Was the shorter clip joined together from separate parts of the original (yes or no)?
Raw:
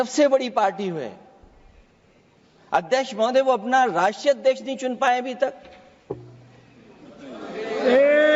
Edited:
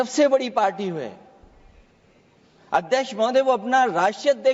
no